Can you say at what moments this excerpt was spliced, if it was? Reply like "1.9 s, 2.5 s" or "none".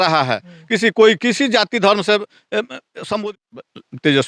3.4 s

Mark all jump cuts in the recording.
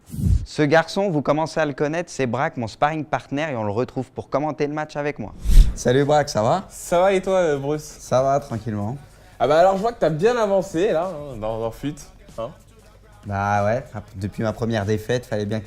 12.8 s

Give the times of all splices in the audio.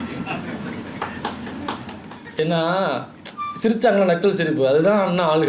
none

